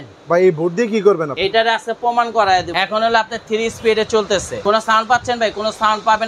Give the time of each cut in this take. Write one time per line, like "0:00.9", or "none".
0:01.3
0:02.7
0:04.6